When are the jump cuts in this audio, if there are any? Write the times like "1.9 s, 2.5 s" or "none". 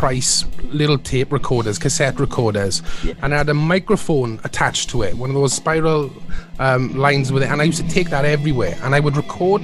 none